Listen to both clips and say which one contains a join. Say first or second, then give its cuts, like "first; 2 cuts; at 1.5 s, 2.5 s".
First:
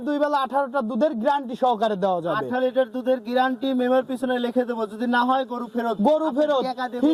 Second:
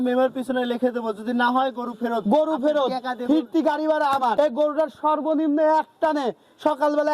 second; 1 cut; at 4.3 s